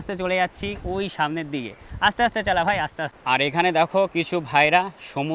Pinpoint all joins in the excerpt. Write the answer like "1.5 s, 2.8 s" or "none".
3.1 s